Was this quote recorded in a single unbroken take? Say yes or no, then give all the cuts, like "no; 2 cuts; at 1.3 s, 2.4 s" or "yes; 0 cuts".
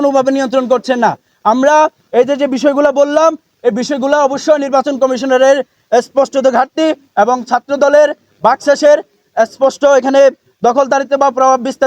yes; 0 cuts